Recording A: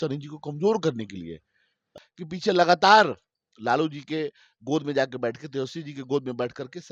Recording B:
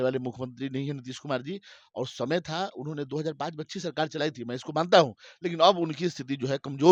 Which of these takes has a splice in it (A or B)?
A